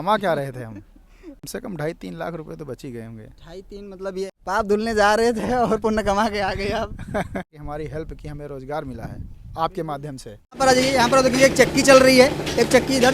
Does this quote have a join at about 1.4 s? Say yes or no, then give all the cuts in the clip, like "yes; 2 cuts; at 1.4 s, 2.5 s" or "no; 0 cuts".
yes; 4 cuts; at 1.4 s, 4.3 s, 7.6 s, 10.6 s